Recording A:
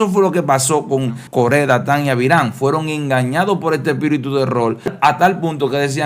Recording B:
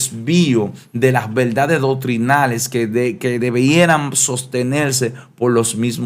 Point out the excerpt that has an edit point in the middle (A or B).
A